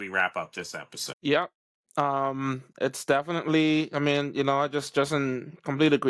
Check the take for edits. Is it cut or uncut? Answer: cut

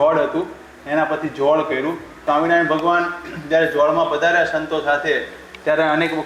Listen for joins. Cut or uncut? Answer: cut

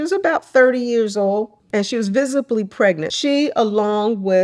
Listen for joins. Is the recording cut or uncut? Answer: cut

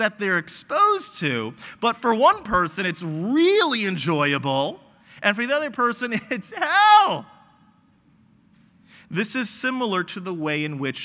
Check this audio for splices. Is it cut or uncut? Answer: uncut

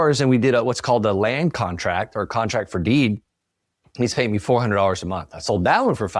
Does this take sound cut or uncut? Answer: uncut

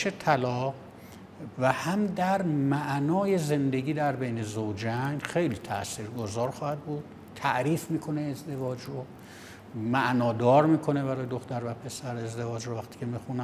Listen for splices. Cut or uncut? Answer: uncut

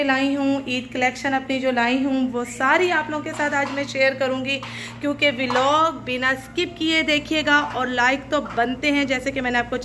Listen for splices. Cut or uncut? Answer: uncut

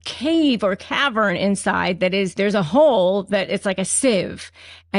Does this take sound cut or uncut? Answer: cut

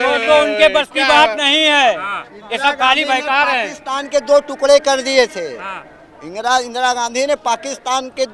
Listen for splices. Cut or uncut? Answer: uncut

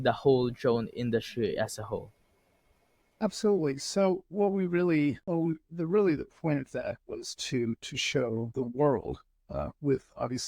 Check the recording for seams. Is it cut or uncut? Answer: cut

